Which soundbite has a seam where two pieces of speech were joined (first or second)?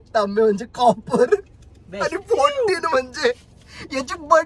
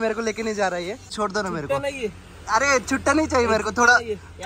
second